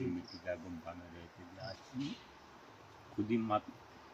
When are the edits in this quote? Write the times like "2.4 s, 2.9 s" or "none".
1.8 s